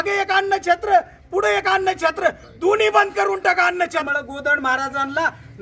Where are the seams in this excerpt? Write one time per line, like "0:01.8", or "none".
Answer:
0:04.1